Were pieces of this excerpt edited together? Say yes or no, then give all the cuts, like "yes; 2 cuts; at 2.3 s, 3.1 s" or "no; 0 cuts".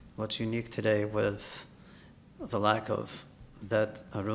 no; 0 cuts